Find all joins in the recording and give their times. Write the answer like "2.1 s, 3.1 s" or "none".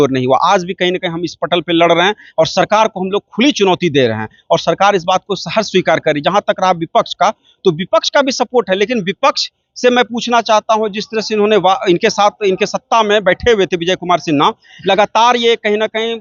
none